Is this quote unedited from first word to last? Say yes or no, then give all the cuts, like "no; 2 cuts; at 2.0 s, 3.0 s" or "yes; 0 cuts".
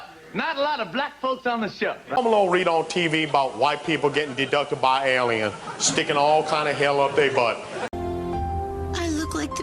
no; 2 cuts; at 2.1 s, 7.9 s